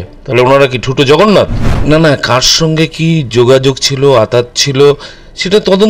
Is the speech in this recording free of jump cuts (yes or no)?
no